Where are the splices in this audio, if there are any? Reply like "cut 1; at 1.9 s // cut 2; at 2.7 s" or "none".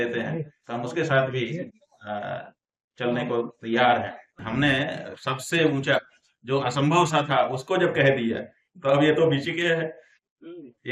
cut 1; at 4.4 s

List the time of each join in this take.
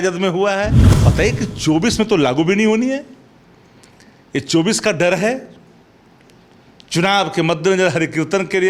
cut 1; at 1.0 s

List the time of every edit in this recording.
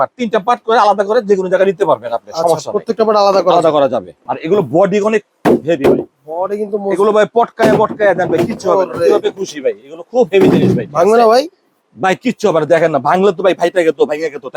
cut 1; at 4.1 s

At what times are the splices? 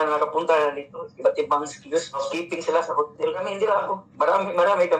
cut 1; at 2.3 s // cut 2; at 3.5 s

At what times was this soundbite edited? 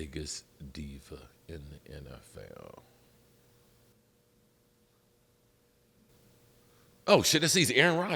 cut 1; at 3.9 s // cut 2; at 6.1 s

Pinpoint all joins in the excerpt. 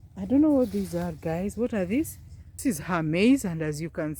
cut 1; at 2.6 s

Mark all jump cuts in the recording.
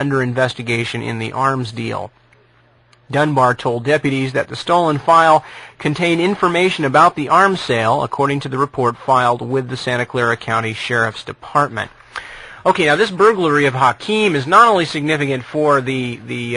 cut 1; at 1.0 s

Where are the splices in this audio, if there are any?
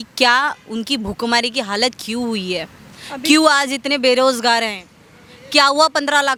none

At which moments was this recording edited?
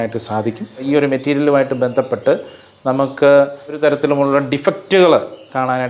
cut 1; at 0.9 s // cut 2; at 3.8 s

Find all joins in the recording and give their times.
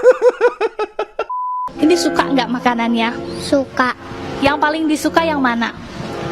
cut 1; at 1.7 s

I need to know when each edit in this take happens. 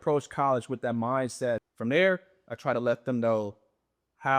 cut 1; at 1.6 s

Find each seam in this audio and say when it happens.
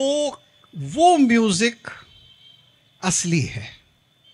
none

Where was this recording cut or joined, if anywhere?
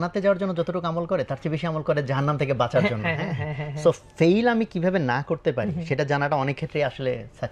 none

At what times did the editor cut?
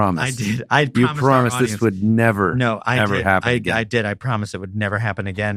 none

